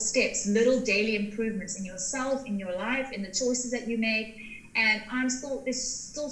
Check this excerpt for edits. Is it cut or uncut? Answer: uncut